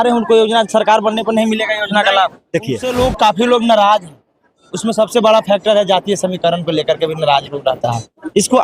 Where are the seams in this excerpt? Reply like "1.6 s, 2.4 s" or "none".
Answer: 2.8 s